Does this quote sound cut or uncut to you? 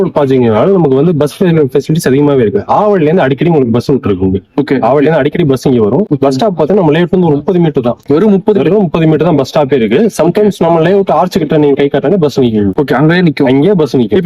uncut